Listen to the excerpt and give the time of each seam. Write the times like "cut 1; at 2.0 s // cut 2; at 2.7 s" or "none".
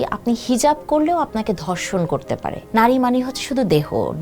cut 1; at 2.6 s